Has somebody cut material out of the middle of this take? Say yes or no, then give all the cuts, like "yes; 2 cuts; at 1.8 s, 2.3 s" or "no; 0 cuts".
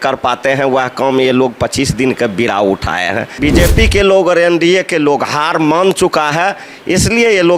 yes; 1 cut; at 3.3 s